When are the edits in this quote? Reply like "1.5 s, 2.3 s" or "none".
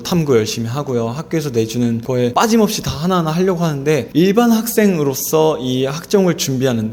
2.3 s, 4.1 s

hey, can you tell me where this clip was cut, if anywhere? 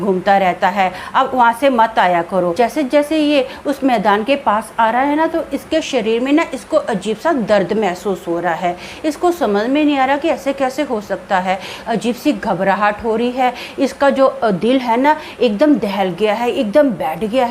2.5 s

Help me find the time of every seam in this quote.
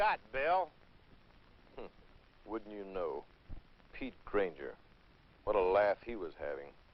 none

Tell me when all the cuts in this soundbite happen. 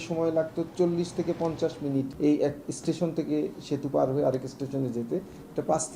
2.1 s

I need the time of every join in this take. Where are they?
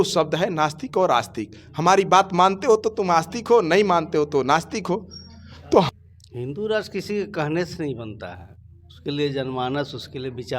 5.9 s

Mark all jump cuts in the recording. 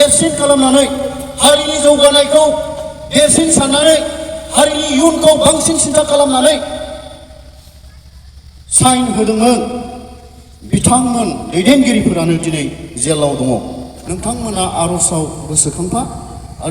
13.9 s

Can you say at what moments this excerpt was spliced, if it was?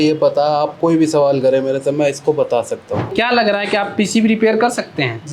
3.1 s

